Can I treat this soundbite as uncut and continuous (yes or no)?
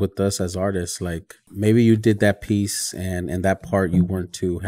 no